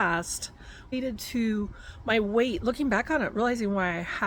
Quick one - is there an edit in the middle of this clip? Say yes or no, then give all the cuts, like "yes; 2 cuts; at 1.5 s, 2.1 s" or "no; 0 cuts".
yes; 1 cut; at 0.9 s